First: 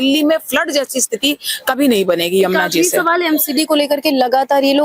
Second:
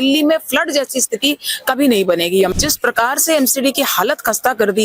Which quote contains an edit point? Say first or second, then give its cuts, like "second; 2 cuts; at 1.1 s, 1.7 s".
second; 1 cut; at 2.5 s